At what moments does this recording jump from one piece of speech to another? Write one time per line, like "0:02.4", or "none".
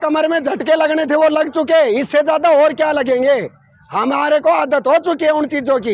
none